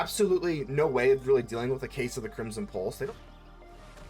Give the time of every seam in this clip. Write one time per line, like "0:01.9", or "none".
0:03.1